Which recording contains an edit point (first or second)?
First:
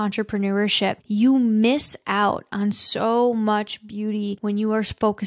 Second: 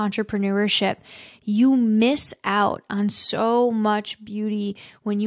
first